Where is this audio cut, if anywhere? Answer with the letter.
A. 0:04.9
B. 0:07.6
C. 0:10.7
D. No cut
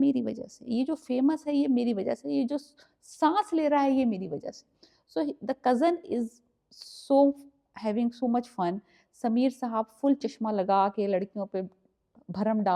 D